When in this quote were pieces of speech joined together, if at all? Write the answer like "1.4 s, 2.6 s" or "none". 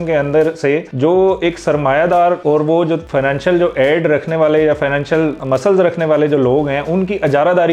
2.7 s, 5.4 s